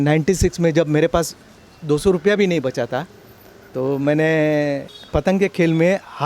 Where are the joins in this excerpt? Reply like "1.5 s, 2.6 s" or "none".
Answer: 4.9 s

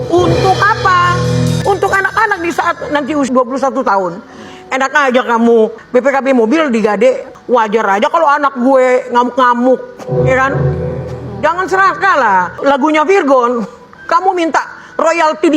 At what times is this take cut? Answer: 1.6 s, 3.3 s, 5.8 s, 7.3 s, 12.6 s

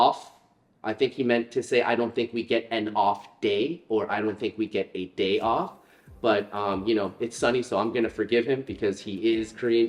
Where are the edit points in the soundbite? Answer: none

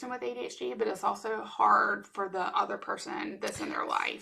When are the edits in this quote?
none

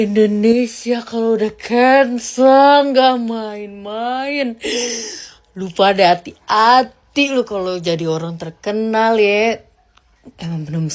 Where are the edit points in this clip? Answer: none

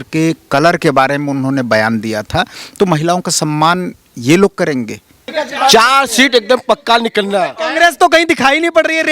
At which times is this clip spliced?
5.4 s

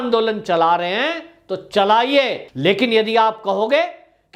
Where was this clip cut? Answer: 2.4 s

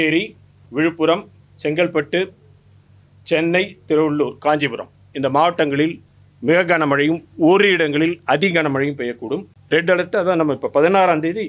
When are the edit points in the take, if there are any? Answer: 9.5 s

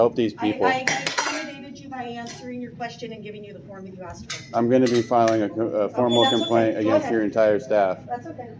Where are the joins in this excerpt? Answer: none

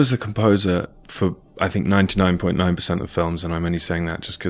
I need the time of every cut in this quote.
1.4 s

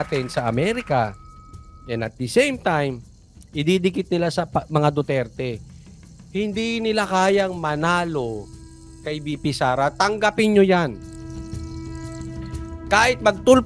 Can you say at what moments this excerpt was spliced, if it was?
none

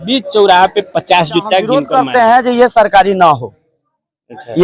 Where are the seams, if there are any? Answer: 1.8 s

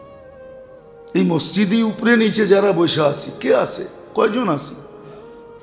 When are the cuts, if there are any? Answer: none

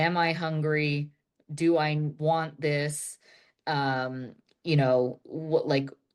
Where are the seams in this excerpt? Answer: none

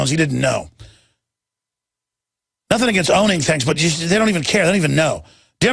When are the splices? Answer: 3.8 s

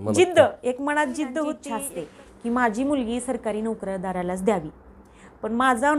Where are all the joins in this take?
1.7 s

